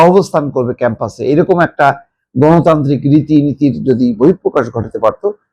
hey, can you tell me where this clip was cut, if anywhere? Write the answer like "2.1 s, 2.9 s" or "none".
none